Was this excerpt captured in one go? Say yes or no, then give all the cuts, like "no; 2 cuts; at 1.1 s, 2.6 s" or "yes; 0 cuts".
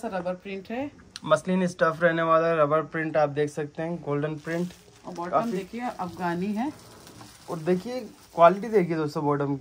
yes; 0 cuts